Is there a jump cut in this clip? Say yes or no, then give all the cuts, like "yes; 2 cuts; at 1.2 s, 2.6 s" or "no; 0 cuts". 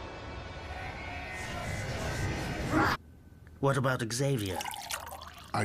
no; 0 cuts